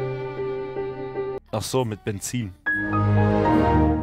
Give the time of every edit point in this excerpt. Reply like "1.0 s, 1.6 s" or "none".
1.4 s